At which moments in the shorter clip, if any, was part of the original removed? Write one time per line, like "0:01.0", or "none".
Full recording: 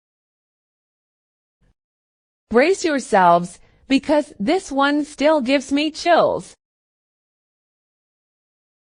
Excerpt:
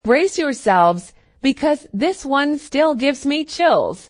none